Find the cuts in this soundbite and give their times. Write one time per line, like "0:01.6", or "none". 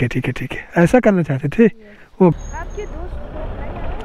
0:02.3